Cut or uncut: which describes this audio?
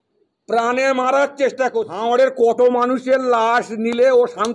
cut